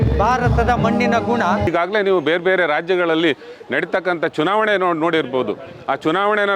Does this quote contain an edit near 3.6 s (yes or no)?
no